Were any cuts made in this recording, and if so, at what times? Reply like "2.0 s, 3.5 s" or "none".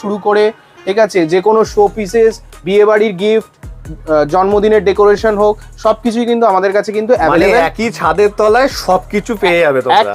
none